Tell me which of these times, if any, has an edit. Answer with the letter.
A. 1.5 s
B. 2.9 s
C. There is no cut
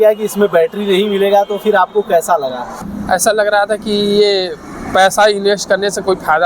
B